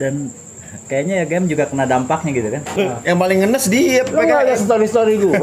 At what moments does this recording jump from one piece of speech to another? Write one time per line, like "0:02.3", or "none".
0:02.8